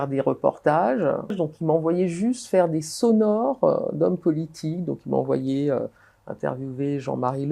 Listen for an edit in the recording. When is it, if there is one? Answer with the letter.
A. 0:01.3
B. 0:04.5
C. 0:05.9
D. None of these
A